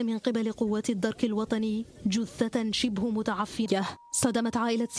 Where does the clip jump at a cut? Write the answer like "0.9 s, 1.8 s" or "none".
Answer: none